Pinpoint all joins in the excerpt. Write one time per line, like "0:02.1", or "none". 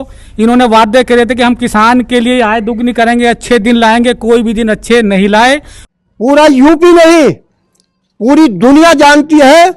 0:05.8

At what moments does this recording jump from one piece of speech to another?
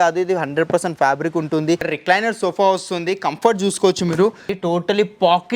0:01.9
0:04.5

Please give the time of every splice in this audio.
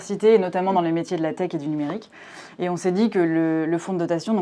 none

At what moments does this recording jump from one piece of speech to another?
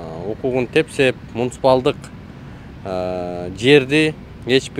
none

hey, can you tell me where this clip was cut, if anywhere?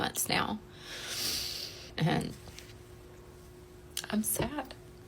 0:01.9

